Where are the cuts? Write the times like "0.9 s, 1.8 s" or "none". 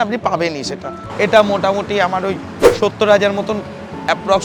1.0 s